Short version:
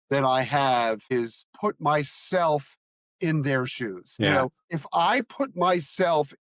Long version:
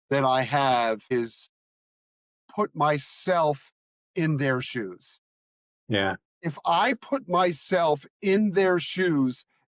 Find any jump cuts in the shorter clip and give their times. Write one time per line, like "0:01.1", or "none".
0:01.4
0:04.4